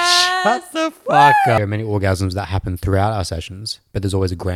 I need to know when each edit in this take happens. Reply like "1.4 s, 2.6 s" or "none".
1.6 s